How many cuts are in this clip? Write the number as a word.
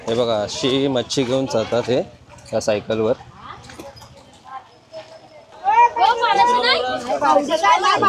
zero